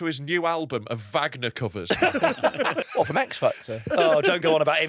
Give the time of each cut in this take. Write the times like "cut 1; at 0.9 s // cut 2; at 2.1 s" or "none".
cut 1; at 1.8 s // cut 2; at 2.8 s // cut 3; at 3.9 s